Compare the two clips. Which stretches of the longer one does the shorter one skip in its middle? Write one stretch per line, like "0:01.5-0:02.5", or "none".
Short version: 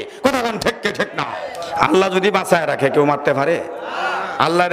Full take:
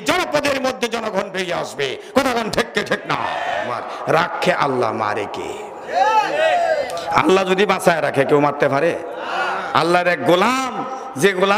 0:03.4-0:06.8